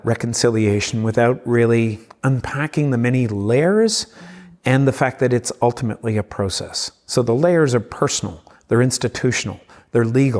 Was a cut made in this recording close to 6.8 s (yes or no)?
no